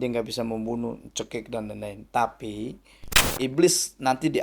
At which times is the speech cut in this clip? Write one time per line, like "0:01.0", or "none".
0:03.2